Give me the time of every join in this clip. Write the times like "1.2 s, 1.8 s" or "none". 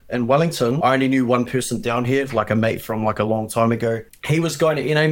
0.8 s, 4.2 s